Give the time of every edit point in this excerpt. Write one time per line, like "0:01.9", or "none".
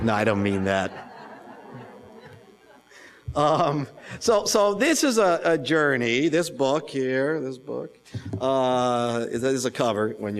0:07.7